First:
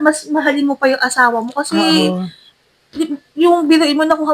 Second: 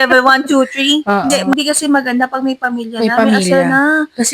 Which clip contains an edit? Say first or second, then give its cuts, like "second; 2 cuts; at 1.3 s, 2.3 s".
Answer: second; 1 cut; at 1.4 s